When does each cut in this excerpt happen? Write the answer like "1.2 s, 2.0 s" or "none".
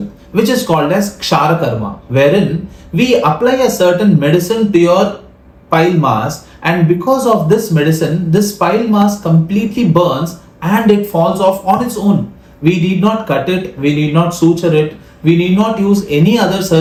none